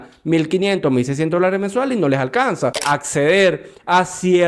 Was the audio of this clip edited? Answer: yes; 1 cut; at 2.8 s

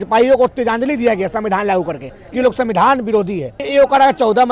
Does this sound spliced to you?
yes; 1 cut; at 3.6 s

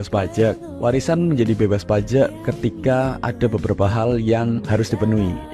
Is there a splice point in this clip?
yes; 1 cut; at 0.9 s

